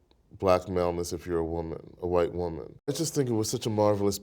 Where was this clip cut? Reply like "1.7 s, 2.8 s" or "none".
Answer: 3.0 s